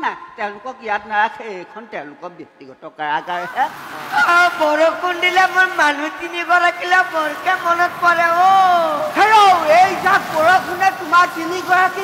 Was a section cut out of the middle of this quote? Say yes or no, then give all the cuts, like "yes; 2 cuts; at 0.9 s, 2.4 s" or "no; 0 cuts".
yes; 1 cut; at 3.9 s